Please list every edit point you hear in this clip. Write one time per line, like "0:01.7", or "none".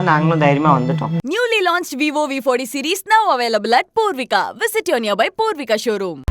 0:01.1